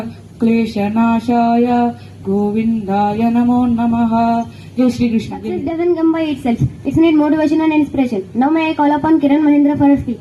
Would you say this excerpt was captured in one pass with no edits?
no; 1 cut; at 5.6 s

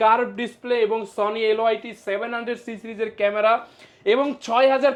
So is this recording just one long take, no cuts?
yes; 0 cuts

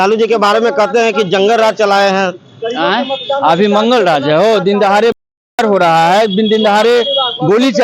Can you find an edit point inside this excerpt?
no; 0 cuts

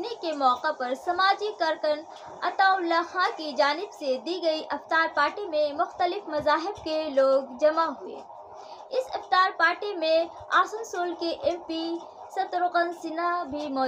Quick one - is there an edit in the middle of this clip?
no; 0 cuts

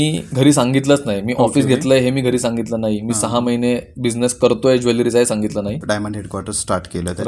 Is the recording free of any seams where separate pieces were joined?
no; 1 cut; at 5.8 s

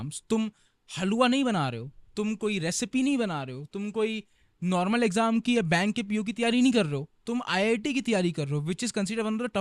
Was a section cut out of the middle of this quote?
no; 0 cuts

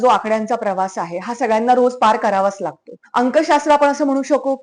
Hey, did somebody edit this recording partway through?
yes; 1 cut; at 3.0 s

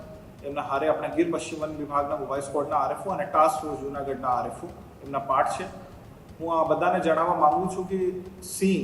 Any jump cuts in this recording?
no; 0 cuts

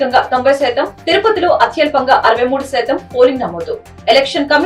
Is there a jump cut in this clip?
no; 0 cuts

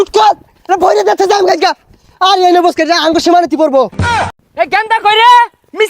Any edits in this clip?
yes; 1 cut; at 4.3 s

